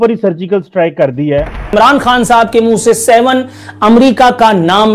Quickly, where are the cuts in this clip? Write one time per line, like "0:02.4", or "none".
0:01.7